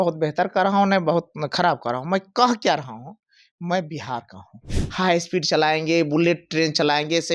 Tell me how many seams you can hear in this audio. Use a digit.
1